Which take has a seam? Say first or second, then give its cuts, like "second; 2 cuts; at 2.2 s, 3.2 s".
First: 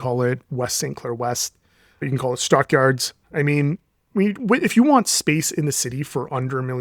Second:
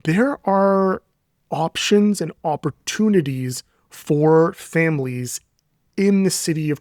first; 2 cuts; at 2.0 s, 3.1 s